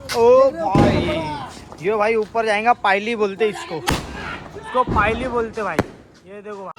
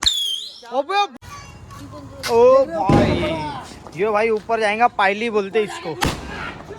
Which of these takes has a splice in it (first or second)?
second